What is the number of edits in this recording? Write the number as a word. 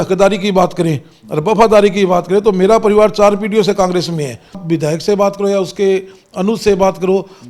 one